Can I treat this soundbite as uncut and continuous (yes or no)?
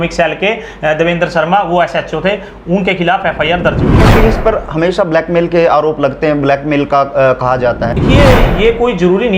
no